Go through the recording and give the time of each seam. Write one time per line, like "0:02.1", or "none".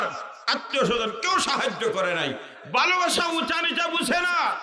0:02.5